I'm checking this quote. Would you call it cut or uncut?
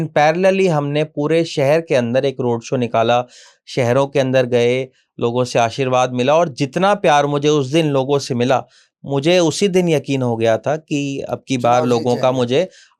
uncut